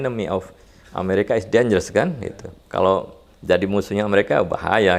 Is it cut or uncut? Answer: uncut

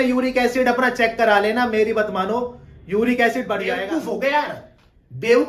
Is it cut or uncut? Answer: cut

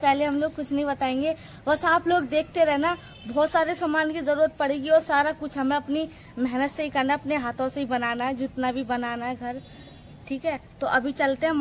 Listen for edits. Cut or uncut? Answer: uncut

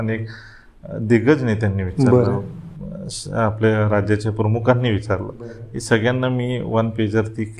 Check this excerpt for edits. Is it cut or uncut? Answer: uncut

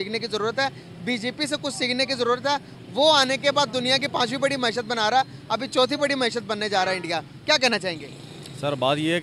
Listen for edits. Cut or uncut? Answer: uncut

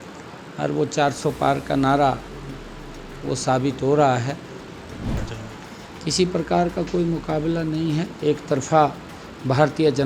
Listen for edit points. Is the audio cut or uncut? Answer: cut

